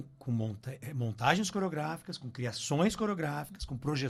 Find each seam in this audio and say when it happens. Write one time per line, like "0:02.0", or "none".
none